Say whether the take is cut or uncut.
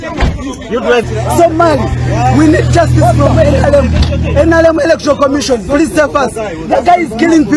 cut